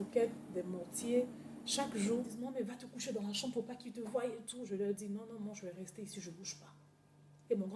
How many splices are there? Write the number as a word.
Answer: one